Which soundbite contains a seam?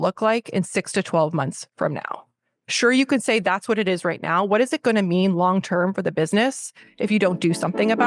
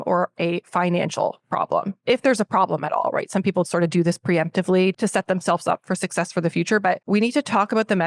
second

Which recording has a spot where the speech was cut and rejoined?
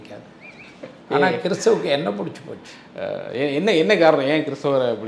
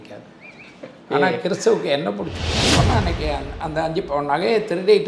second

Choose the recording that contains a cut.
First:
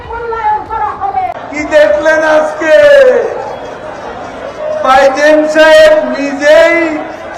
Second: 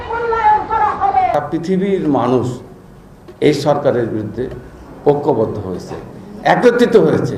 first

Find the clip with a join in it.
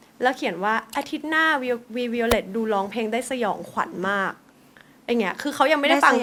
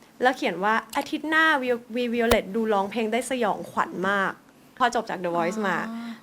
second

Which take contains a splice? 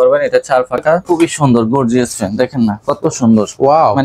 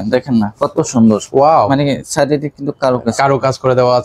first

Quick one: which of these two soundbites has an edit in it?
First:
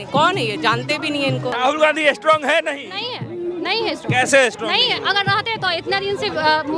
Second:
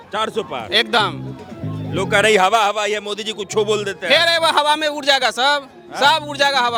first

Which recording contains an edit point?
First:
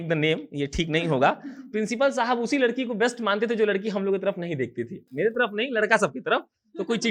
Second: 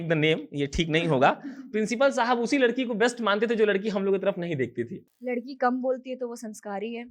second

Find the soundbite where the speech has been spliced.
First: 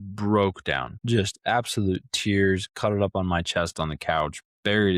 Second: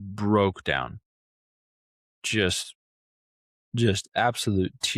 first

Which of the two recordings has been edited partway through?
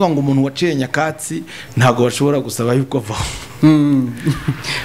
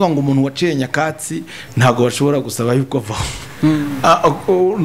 second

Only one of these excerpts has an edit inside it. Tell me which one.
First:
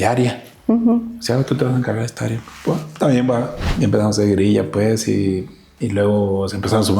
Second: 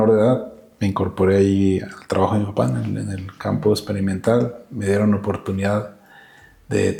first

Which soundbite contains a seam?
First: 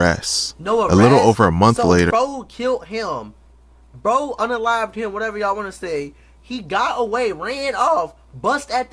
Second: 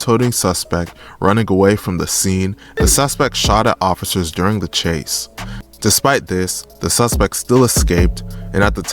second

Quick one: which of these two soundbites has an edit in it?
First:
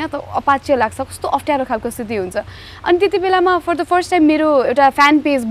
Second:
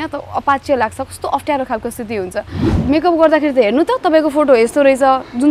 second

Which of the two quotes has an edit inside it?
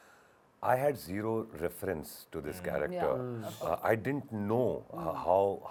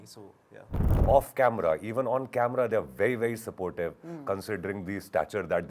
second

